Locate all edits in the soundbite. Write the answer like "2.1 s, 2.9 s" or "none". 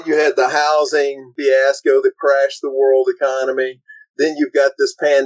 1.3 s